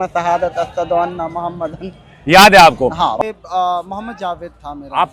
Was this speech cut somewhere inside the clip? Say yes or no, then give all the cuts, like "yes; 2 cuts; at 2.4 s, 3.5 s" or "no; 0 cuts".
yes; 1 cut; at 3.1 s